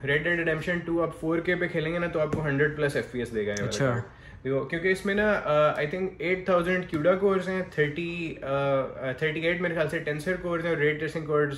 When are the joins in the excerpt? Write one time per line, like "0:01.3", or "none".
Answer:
none